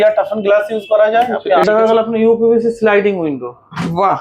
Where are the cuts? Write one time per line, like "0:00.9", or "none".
0:01.6

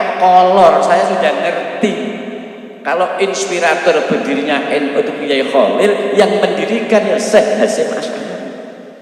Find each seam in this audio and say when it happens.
none

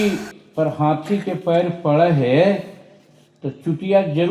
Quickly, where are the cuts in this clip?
none

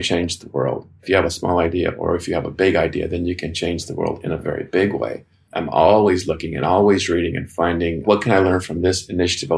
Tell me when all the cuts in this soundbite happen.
0:01.0

